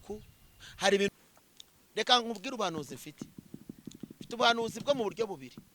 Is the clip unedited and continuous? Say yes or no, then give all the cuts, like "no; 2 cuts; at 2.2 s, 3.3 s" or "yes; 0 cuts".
no; 1 cut; at 1.1 s